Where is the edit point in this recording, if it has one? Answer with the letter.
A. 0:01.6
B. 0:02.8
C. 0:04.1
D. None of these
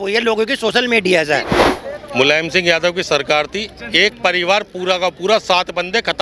A